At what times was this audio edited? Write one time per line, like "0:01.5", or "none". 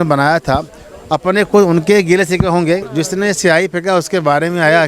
0:02.9